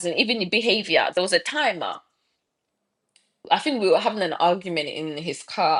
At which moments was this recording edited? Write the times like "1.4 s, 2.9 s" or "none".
none